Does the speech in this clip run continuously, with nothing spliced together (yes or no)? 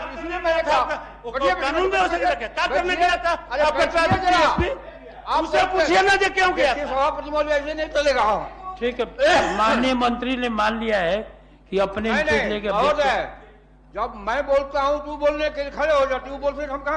yes